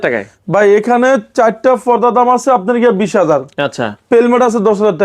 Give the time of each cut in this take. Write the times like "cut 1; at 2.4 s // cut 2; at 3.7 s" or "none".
none